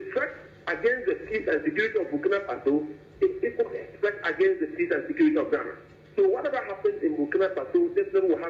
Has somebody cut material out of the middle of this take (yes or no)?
no